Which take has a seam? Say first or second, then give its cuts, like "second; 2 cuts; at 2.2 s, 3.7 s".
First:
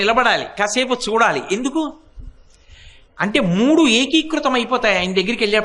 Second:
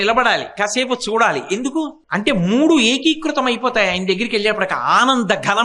second; 1 cut; at 2.0 s